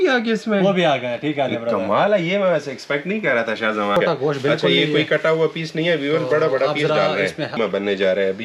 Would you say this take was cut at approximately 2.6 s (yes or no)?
no